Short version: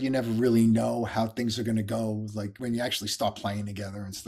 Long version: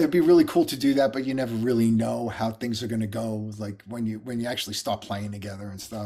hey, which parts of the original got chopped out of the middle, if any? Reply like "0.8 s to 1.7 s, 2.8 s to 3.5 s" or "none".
3.8 s to 4.2 s